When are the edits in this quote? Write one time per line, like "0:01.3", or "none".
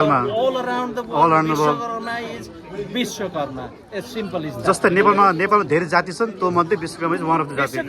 none